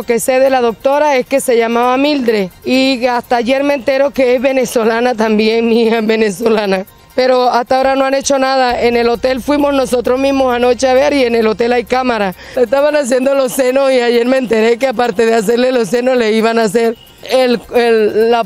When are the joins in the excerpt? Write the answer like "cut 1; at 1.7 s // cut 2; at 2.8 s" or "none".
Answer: cut 1; at 2.6 s // cut 2; at 6.8 s // cut 3; at 12.4 s // cut 4; at 17.1 s